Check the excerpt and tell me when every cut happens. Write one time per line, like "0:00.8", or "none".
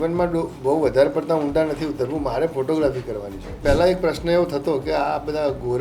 0:03.6